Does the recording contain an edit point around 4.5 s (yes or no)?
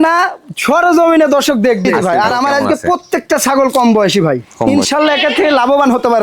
yes